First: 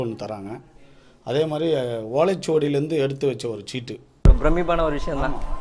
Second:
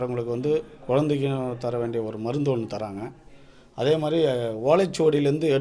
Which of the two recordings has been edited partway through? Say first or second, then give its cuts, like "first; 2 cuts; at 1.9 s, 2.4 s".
first; 1 cut; at 4.1 s